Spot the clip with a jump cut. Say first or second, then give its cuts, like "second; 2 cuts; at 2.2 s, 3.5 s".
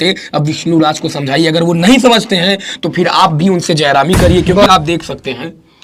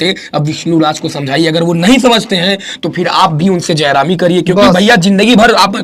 first; 1 cut; at 4.6 s